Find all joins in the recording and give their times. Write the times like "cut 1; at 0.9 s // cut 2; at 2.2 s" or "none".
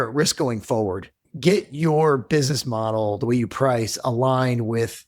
cut 1; at 1.3 s